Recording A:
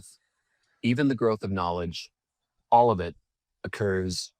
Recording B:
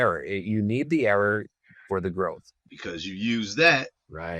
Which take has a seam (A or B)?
B